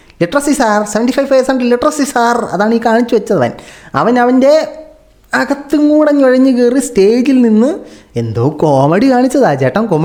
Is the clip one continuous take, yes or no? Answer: yes